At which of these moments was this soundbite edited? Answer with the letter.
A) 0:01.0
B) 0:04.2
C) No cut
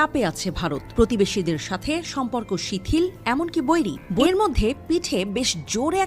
B